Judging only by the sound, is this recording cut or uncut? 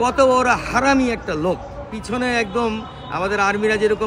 cut